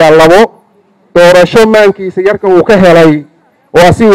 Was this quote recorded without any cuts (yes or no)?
yes